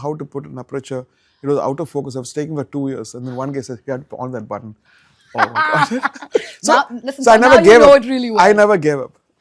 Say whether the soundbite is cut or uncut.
uncut